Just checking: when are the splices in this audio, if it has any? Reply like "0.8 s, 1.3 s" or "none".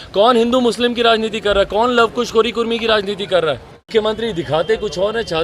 3.9 s